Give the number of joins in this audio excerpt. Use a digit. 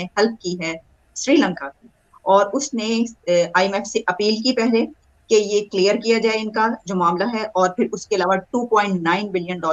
0